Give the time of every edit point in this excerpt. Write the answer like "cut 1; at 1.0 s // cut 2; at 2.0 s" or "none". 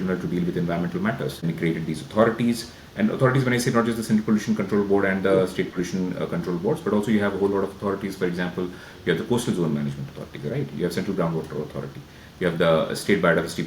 cut 1; at 1.4 s